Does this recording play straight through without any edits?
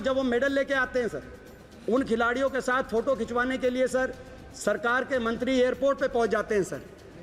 yes; 0 cuts

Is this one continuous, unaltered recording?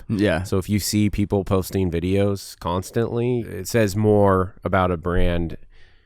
no; 1 cut; at 3.4 s

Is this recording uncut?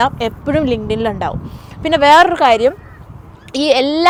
yes; 0 cuts

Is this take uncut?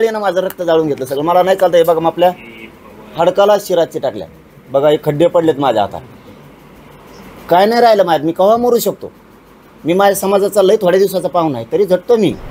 yes; 0 cuts

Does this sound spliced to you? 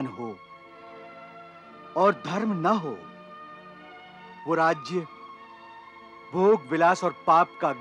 no; 0 cuts

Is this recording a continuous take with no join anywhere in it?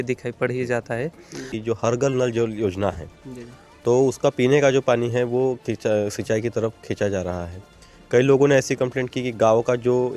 no; 1 cut; at 1.5 s

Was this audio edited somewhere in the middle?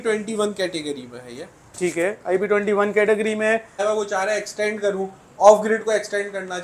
yes; 1 cut; at 3.8 s

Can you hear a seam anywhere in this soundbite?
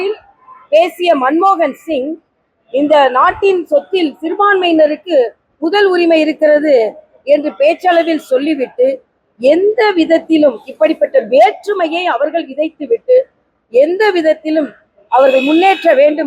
no; 0 cuts

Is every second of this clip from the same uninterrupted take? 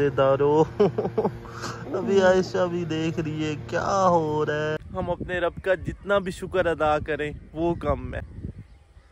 no; 2 cuts; at 4.8 s, 8.2 s

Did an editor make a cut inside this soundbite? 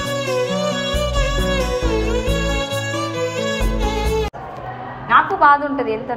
yes; 1 cut; at 4.4 s

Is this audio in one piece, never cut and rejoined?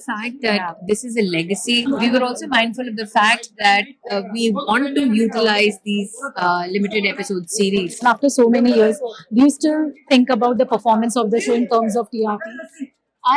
no; 2 cuts; at 1.8 s, 8.0 s

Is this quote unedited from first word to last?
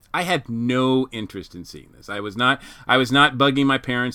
yes; 0 cuts

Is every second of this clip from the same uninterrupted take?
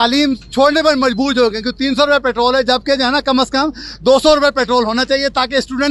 yes; 0 cuts

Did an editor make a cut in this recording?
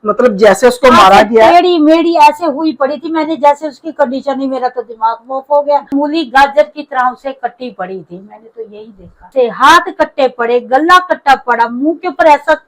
yes; 2 cuts; at 5.9 s, 9.3 s

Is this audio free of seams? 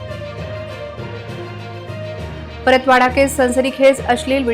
no; 1 cut; at 1.5 s

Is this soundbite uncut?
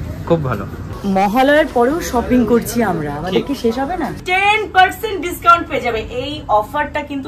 no; 2 cuts; at 0.9 s, 4.2 s

